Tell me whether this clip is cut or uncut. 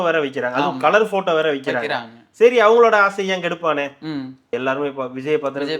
cut